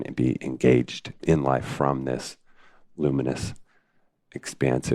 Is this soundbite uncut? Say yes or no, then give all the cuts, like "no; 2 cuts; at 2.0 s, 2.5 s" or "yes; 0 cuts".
no; 1 cut; at 1.2 s